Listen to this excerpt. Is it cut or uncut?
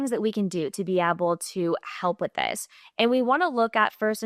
uncut